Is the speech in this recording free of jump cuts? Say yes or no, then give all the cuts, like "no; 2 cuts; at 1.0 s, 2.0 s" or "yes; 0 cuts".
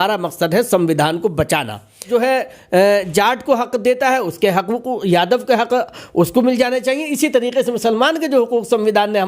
no; 1 cut; at 2.0 s